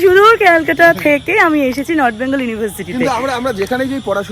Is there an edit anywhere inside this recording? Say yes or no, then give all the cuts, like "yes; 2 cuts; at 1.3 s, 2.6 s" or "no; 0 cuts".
no; 0 cuts